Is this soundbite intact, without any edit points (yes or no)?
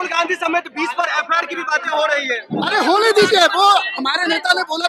yes